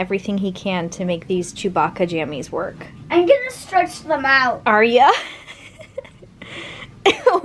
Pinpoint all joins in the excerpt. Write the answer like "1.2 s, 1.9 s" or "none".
none